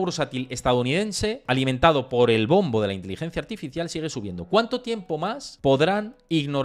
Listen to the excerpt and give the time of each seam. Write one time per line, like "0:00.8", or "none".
0:01.4
0:05.5